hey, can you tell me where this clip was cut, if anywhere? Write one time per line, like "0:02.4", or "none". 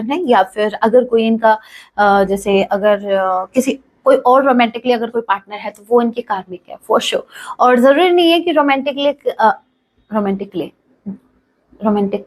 none